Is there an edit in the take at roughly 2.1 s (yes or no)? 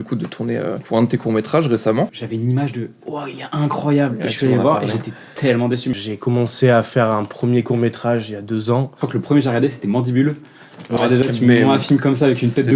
yes